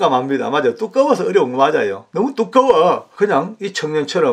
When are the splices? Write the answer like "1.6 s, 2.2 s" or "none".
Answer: 2.0 s, 3.1 s